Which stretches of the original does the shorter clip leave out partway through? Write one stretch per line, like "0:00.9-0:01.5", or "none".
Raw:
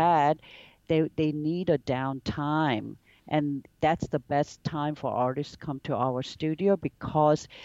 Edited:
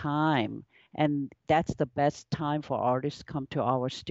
none